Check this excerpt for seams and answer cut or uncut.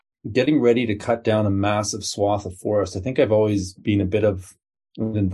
uncut